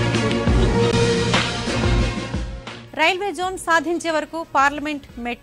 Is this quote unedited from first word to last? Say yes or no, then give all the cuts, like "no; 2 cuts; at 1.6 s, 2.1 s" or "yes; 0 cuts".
no; 1 cut; at 0.9 s